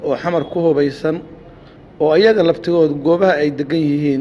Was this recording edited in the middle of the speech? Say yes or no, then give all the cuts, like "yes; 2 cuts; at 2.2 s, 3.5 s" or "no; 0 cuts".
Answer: no; 0 cuts